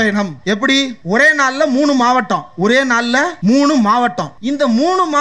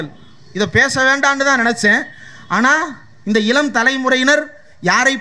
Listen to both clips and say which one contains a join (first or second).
first